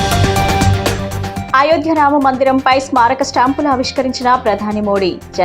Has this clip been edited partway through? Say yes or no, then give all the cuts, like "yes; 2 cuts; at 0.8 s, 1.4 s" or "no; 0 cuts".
yes; 1 cut; at 1.0 s